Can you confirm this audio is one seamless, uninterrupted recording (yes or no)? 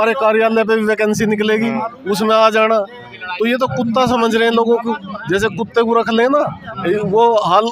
yes